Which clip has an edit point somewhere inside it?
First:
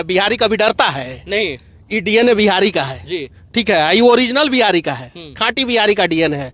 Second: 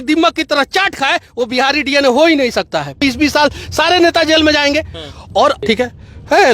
second; 2 cuts; at 3.0 s, 5.6 s

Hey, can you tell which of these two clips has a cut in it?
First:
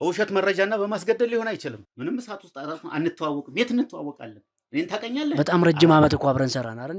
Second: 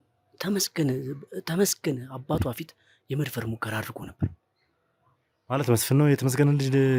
first; 1 cut; at 1.9 s

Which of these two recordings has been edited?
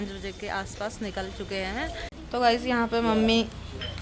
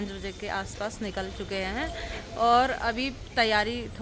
first; 1 cut; at 2.1 s

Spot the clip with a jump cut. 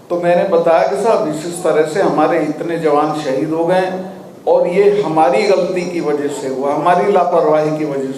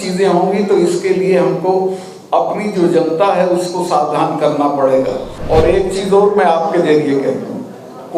second; 1 cut; at 5.4 s

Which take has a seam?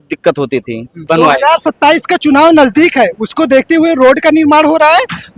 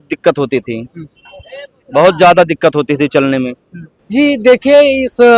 first; 1 cut; at 1.0 s

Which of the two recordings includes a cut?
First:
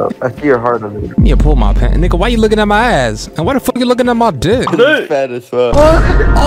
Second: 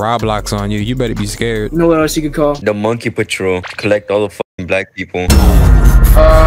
first; 1 cut; at 4.7 s

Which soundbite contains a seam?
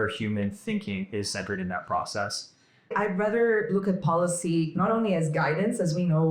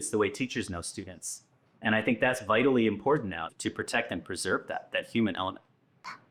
first; 1 cut; at 2.9 s

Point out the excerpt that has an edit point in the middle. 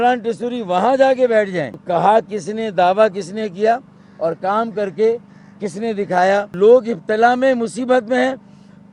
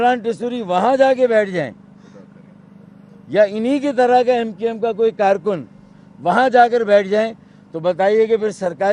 first; 2 cuts; at 1.8 s, 6.5 s

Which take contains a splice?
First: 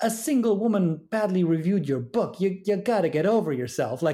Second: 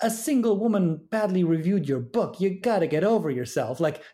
second; 1 cut; at 2.6 s

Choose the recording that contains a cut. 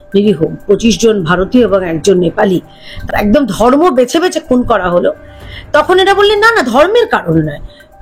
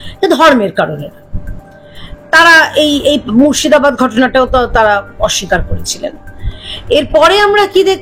first; 1 cut; at 2.9 s

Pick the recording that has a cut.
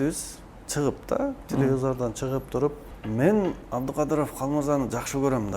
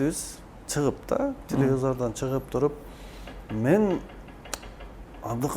first; 2 cuts; at 2.9 s, 3.6 s

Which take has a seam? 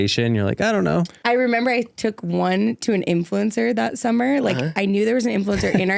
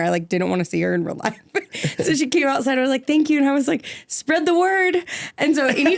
first; 1 cut; at 1.1 s

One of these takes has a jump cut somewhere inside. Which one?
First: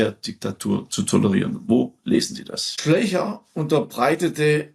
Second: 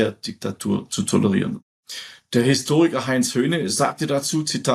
second; 1 cut; at 1.6 s

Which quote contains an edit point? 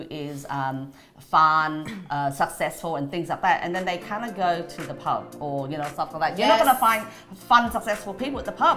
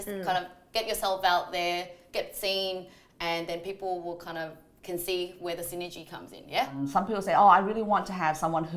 second; 1 cut; at 6.8 s

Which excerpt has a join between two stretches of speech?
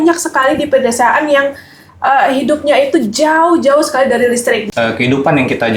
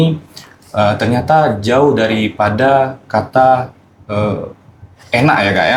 first; 1 cut; at 4.6 s

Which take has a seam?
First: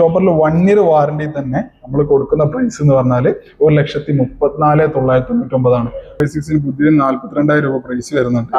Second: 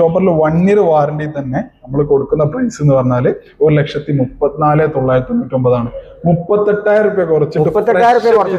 first; 1 cut; at 6.1 s

